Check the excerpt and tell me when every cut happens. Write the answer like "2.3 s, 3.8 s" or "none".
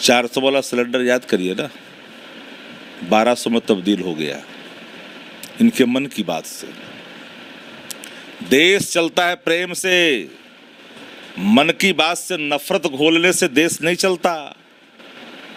none